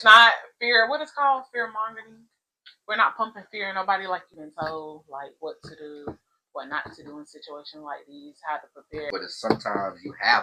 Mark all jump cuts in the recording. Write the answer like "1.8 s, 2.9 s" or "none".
4.4 s, 9.1 s